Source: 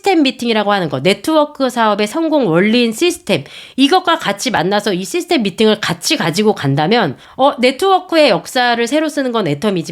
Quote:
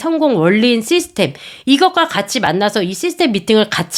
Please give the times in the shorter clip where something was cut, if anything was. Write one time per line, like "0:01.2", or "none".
none

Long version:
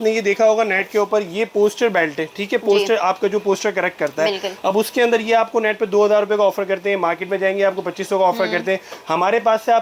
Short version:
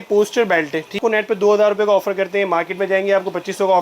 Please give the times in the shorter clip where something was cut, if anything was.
0:01.0

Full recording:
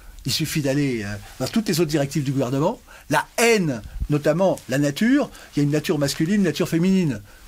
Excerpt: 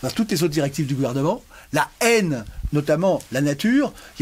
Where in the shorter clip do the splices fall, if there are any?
none

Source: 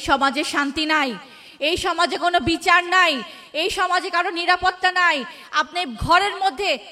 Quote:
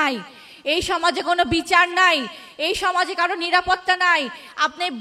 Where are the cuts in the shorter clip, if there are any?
none

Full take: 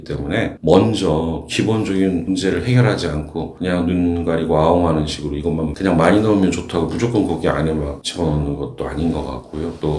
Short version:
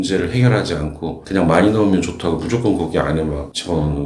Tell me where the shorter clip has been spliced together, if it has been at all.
0:01.2

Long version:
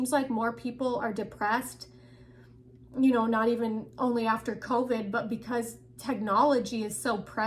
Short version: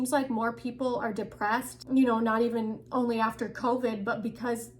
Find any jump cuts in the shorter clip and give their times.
0:01.7

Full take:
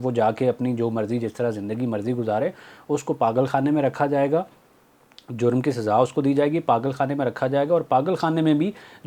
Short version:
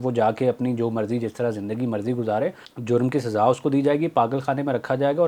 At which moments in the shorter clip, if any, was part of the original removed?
0:02.7

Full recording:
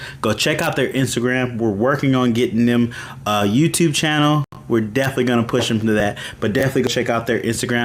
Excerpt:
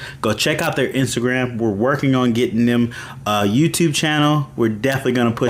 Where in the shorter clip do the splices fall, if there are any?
0:04.5

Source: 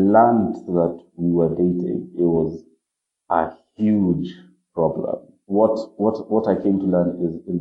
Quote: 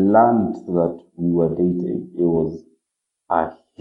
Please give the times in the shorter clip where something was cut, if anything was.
none

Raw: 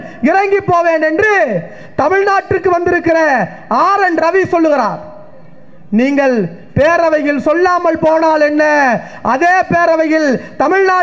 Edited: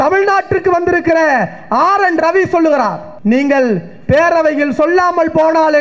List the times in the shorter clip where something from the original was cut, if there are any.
0:03.1

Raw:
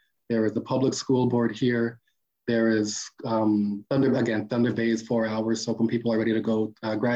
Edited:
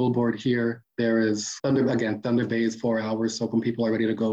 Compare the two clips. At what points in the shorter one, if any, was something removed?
0:00.8
0:01.5

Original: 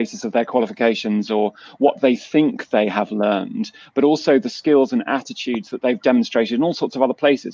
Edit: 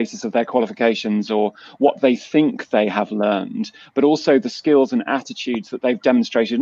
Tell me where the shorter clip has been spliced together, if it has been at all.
none

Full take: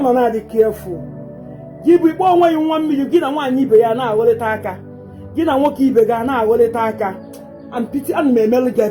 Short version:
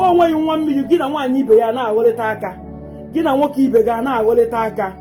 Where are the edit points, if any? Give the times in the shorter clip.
none

